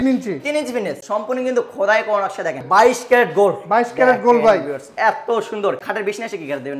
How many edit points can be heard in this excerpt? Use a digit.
3